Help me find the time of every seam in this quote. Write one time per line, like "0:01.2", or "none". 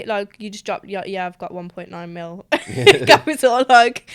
none